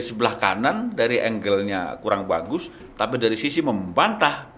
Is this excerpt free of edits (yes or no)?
yes